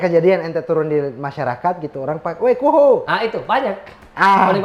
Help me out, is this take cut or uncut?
uncut